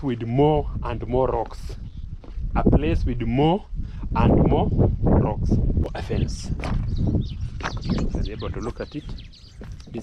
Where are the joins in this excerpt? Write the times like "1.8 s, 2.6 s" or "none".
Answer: 5.9 s